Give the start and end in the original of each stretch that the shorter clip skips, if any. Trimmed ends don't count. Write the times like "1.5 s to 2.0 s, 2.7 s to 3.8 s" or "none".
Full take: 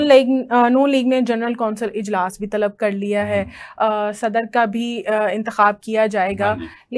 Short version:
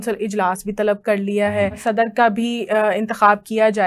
3.5 s to 4.1 s